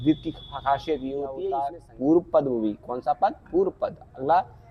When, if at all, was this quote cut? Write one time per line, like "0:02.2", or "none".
0:01.4